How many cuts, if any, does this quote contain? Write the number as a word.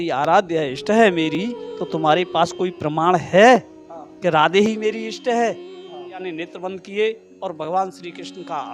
one